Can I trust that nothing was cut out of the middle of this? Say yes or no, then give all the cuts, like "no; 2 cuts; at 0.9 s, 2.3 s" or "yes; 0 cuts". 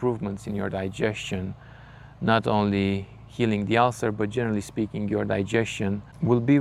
yes; 0 cuts